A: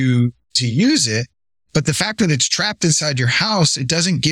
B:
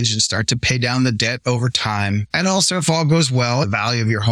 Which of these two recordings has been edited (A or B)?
B